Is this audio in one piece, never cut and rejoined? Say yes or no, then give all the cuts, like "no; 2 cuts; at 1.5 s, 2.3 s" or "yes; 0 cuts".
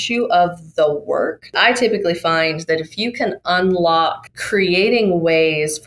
no; 2 cuts; at 1.5 s, 4.3 s